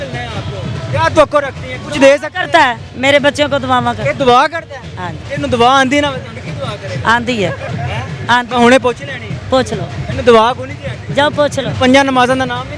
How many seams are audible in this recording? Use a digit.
0